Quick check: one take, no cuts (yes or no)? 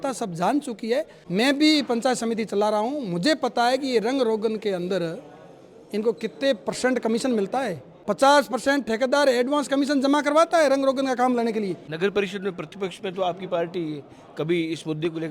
no